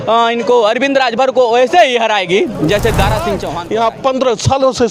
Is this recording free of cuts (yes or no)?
no